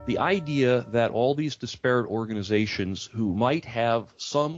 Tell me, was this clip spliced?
no; 0 cuts

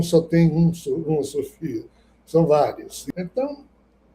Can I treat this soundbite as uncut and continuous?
no; 1 cut; at 3.0 s

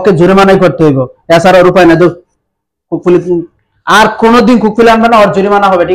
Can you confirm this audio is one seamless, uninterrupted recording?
yes; 0 cuts

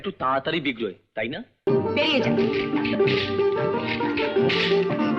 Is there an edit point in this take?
yes; 1 cut; at 1.6 s

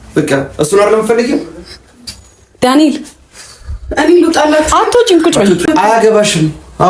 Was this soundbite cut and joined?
yes; 1 cut; at 5.6 s

